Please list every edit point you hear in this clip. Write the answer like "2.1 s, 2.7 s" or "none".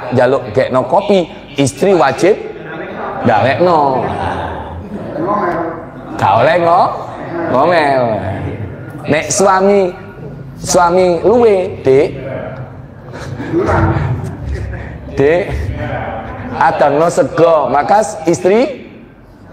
none